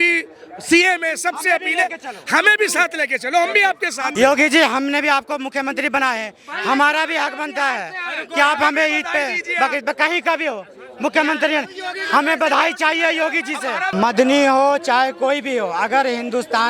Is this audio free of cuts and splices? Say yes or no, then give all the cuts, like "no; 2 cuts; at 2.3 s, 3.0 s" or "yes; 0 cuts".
no; 2 cuts; at 4.1 s, 13.9 s